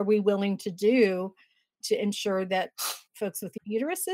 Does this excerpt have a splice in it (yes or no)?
no